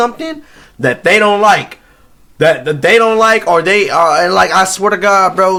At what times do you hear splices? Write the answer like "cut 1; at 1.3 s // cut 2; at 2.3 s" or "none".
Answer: none